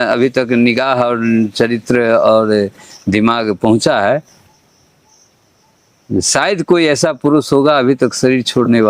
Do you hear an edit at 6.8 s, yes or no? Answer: no